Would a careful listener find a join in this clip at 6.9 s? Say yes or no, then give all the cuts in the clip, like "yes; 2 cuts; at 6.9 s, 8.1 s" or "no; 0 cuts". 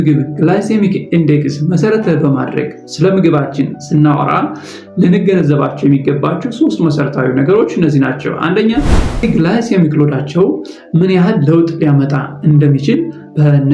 no; 1 cut; at 9.2 s